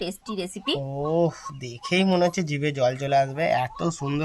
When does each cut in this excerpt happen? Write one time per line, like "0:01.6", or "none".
none